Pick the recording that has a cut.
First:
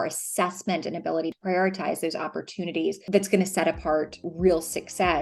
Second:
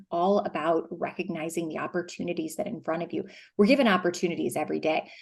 first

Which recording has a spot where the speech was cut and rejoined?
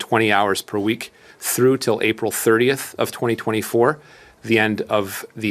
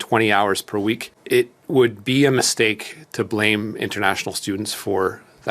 second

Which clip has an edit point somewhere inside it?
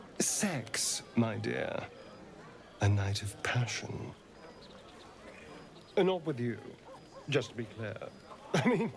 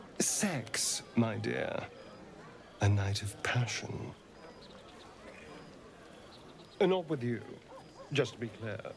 first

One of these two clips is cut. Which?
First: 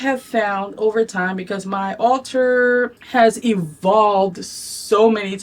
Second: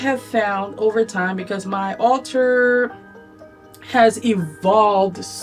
first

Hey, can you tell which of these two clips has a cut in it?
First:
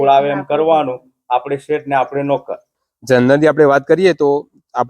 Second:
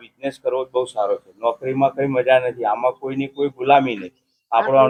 first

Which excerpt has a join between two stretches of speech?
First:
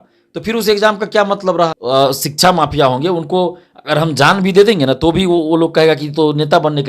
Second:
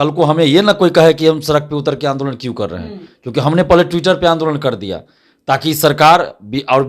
first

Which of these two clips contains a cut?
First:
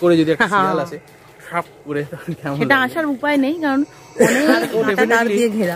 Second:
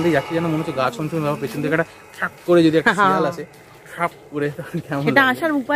first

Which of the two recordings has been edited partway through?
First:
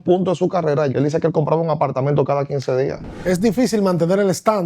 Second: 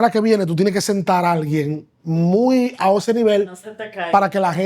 first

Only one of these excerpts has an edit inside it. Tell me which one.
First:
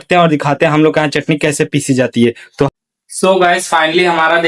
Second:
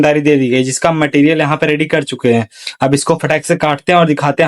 first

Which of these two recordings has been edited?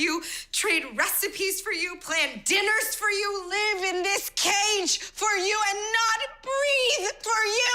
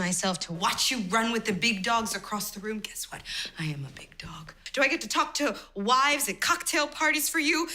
second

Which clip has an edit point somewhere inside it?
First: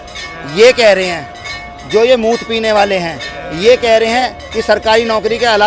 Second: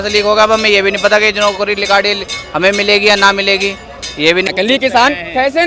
second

